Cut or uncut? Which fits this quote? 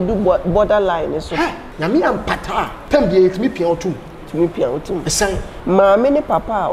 cut